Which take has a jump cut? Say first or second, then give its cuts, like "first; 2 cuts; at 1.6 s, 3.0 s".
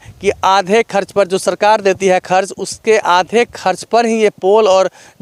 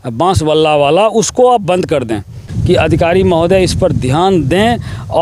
second; 1 cut; at 2.5 s